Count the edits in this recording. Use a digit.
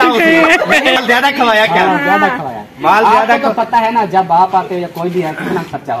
1